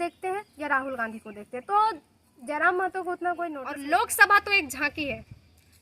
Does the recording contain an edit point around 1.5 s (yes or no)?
no